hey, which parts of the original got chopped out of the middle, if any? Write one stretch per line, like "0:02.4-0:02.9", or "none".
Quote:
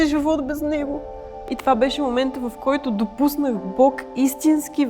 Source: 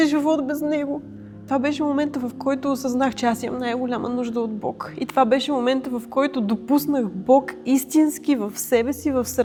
0:01.3-0:04.8